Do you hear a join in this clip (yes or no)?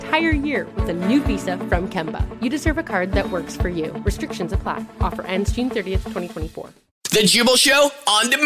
yes